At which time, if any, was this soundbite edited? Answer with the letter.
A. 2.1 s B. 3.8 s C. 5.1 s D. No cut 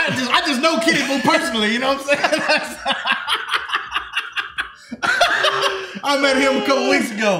D